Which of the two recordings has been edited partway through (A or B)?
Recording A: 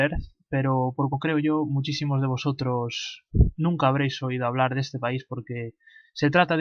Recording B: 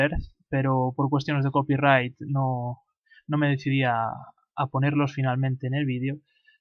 B